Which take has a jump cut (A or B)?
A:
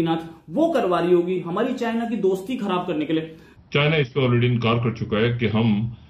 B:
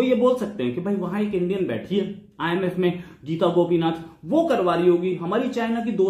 A